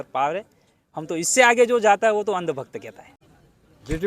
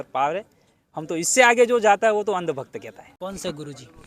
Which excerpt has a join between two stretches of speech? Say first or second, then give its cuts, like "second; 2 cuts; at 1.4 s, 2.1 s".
first; 1 cut; at 3.0 s